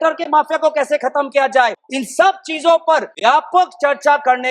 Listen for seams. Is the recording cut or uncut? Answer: cut